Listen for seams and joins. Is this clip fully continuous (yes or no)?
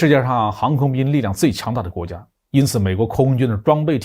yes